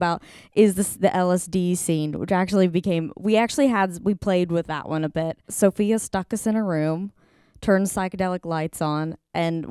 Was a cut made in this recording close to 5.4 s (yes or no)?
yes